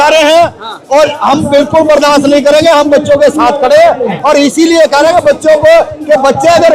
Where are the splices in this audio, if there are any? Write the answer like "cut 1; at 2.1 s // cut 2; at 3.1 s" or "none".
none